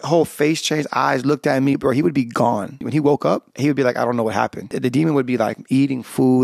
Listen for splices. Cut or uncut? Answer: cut